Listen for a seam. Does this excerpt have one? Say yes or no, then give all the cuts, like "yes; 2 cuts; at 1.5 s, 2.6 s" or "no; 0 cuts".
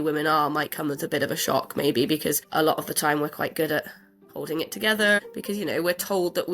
yes; 1 cut; at 5.2 s